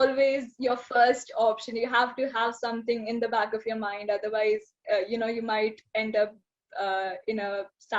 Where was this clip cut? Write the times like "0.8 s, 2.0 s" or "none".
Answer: none